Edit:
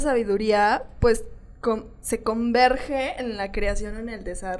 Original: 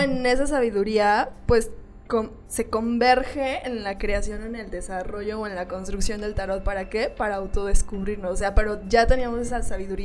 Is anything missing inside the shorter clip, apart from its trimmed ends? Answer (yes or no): no